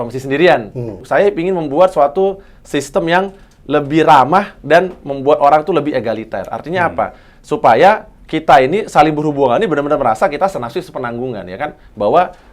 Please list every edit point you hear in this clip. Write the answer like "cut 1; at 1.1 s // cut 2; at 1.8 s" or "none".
cut 1; at 1.0 s